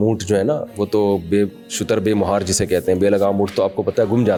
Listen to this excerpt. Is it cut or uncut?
uncut